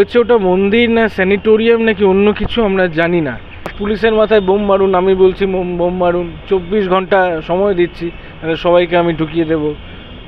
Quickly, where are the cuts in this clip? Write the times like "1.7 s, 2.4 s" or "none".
3.8 s